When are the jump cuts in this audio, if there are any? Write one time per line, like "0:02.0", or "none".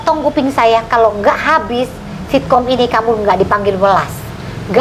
none